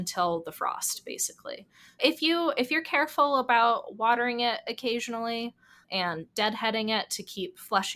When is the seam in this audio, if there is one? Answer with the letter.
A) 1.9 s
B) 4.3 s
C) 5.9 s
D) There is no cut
A